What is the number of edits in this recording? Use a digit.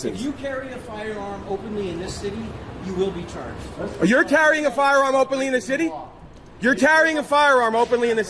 1